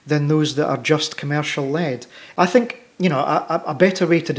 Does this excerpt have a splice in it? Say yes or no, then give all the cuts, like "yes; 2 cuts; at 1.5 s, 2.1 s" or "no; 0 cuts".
yes; 1 cut; at 2.2 s